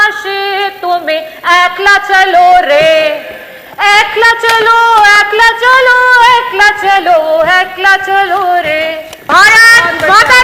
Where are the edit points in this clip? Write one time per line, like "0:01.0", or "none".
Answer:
0:09.2